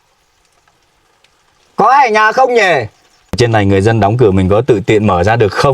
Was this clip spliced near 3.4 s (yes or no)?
yes